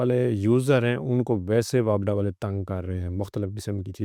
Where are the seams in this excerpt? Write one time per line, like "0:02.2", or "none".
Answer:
none